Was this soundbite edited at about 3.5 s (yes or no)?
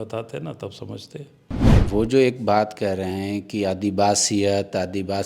no